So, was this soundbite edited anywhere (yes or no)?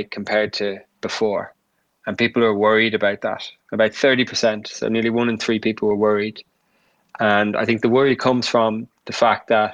no